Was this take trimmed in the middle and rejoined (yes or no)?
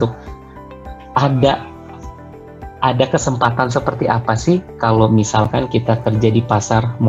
no